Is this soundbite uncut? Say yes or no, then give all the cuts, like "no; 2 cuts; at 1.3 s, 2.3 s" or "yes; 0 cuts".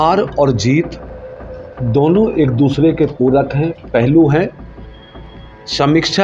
yes; 0 cuts